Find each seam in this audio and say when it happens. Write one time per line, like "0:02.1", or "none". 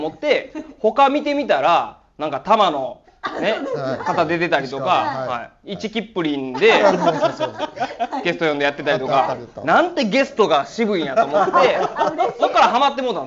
none